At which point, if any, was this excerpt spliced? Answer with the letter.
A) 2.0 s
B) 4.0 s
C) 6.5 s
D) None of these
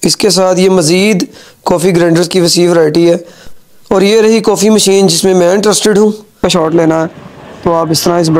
C